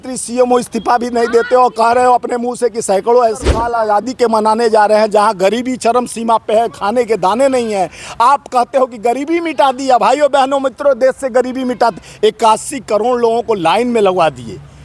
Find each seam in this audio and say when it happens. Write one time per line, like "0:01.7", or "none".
0:03.6